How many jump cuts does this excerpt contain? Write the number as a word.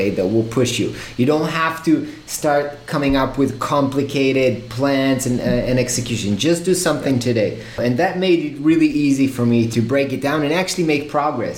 zero